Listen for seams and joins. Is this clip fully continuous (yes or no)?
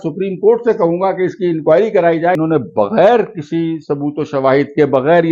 no